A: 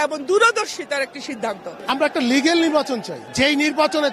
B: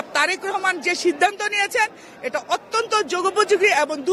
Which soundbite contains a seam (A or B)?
A